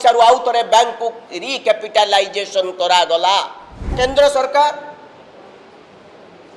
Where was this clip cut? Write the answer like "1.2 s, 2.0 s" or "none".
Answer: 3.9 s